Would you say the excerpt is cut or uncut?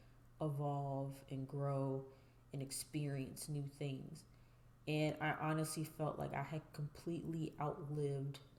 uncut